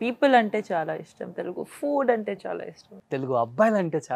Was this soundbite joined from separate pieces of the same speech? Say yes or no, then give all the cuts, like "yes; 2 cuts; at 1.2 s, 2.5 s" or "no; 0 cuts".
yes; 1 cut; at 3.0 s